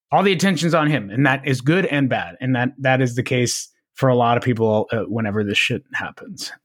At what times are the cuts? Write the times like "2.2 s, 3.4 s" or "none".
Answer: none

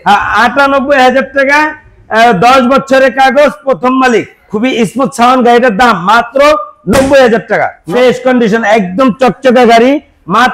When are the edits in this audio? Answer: 4.4 s, 7.8 s

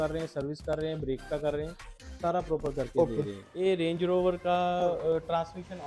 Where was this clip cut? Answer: 3.1 s

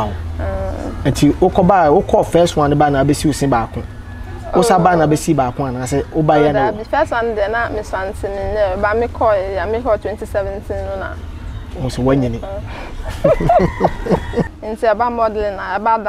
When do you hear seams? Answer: 14.6 s

